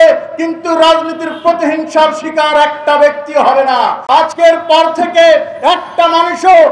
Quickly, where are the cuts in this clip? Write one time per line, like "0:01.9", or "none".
0:04.0